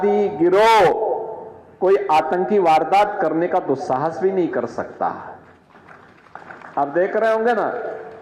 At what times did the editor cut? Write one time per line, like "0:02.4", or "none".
none